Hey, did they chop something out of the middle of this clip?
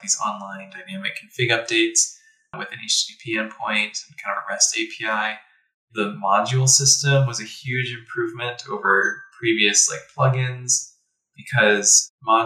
yes; 1 cut; at 2.6 s

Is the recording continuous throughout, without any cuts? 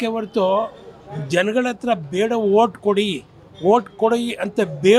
yes; 0 cuts

